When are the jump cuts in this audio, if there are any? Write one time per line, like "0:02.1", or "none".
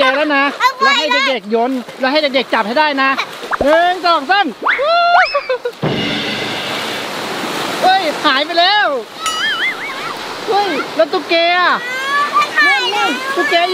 0:03.5